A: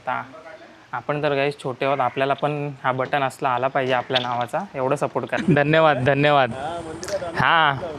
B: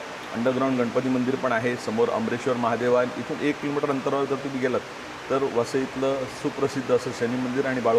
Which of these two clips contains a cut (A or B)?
A